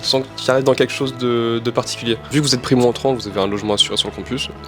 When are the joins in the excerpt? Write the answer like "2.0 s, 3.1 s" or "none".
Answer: 2.3 s